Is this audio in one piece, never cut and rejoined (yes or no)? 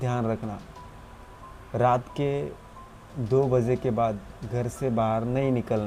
yes